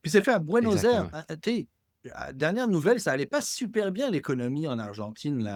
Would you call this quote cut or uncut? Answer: uncut